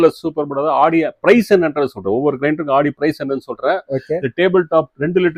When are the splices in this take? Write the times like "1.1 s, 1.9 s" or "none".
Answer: none

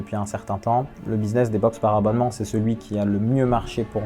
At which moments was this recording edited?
none

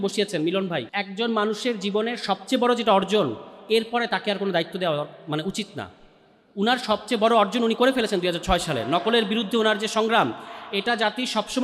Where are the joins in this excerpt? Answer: 1.0 s

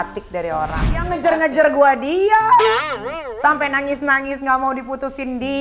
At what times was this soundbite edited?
1.0 s

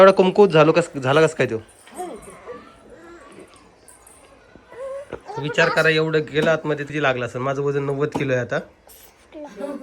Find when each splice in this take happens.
6.9 s

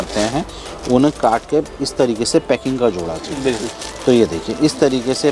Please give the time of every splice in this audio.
none

